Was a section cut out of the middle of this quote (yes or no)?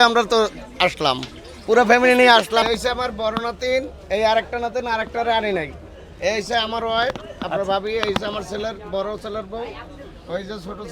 yes